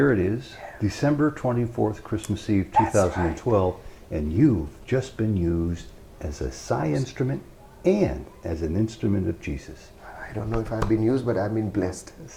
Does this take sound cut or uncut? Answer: uncut